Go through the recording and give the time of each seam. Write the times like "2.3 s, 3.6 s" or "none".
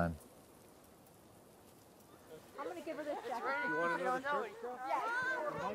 2.5 s